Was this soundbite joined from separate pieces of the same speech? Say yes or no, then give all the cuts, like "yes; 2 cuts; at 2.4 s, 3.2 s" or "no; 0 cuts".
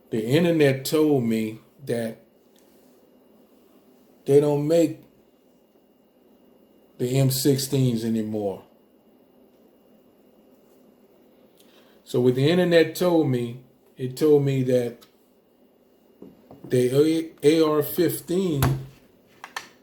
no; 0 cuts